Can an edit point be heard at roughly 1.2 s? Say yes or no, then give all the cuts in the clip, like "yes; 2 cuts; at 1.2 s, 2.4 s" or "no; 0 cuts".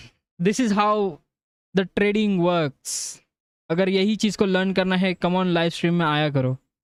no; 0 cuts